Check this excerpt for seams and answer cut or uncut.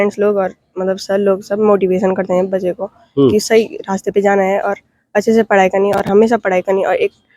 uncut